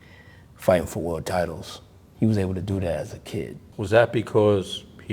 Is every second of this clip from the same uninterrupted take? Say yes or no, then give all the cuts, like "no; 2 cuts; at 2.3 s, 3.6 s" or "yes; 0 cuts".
no; 1 cut; at 3.6 s